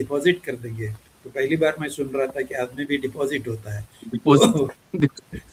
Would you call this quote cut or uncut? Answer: uncut